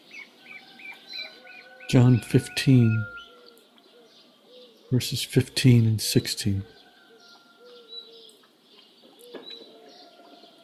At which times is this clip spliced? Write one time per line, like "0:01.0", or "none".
0:01.9
0:02.9
0:04.8
0:06.7

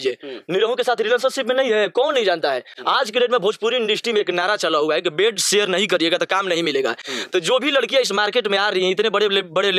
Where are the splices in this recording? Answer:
none

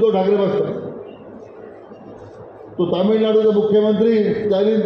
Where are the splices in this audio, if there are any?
none

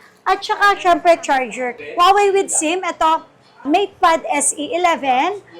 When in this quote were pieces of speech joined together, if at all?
0:01.8

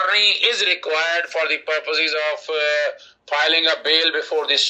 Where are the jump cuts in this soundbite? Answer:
none

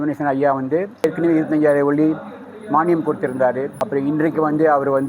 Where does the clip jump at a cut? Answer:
0:01.0
0:03.8

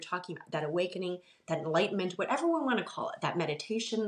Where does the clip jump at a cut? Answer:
none

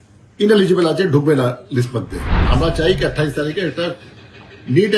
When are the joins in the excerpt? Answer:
0:02.4

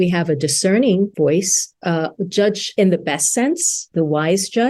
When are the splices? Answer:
0:01.1
0:02.6
0:03.8

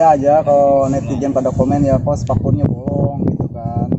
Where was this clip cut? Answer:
none

